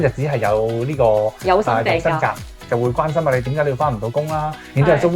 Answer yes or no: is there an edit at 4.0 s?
no